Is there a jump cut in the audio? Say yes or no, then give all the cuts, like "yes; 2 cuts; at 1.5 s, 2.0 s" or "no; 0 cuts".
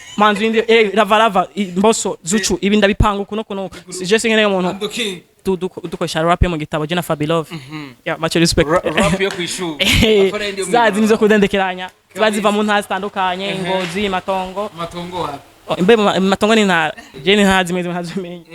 yes; 2 cuts; at 5.4 s, 17.1 s